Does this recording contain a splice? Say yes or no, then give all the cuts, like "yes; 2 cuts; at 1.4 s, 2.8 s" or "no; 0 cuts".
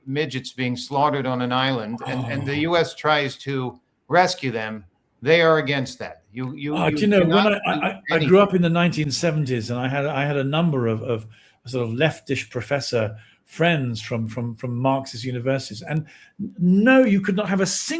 no; 0 cuts